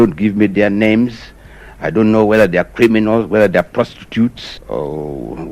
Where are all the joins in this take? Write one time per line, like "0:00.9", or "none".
0:04.5